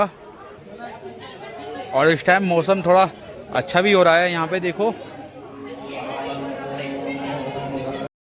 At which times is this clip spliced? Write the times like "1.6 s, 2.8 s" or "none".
none